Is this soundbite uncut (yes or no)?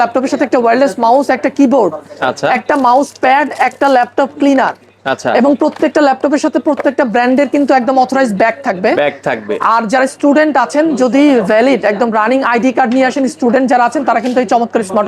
yes